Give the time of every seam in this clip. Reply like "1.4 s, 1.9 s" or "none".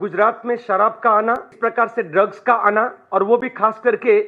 1.5 s